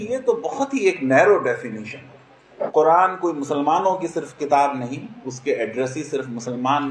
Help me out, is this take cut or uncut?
cut